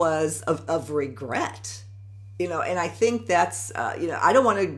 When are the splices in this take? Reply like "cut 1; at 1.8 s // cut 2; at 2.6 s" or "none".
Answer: none